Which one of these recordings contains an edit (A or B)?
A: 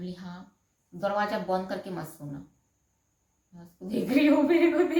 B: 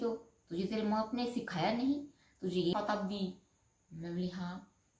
B